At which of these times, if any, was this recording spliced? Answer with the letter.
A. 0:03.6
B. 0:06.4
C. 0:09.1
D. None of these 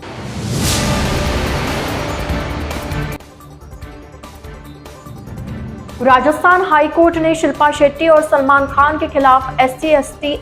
D